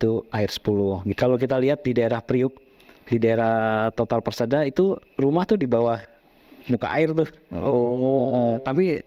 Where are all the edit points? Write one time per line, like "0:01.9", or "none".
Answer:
0:01.1

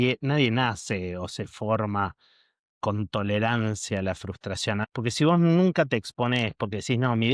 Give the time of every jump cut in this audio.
0:04.9

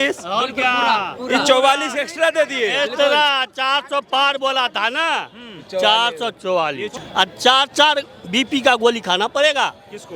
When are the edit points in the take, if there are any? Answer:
0:06.9

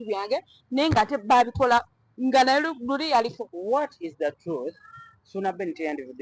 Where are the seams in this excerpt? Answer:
0:03.5

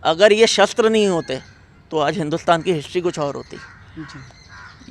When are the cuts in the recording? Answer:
none

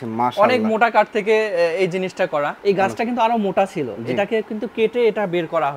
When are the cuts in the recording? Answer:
0:02.5

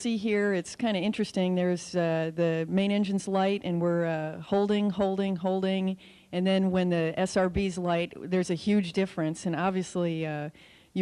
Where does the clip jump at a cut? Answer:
none

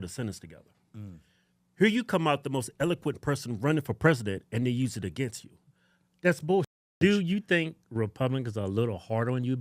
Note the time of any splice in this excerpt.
0:06.9

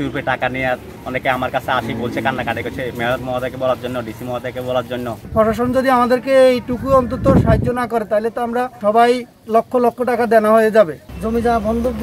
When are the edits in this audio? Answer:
0:00.9
0:05.3
0:08.8
0:09.4
0:11.1

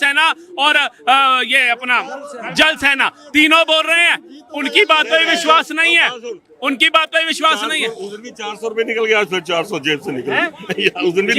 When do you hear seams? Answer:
none

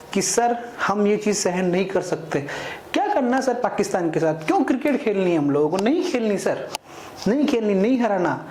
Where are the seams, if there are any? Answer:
none

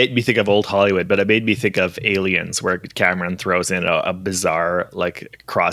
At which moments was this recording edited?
none

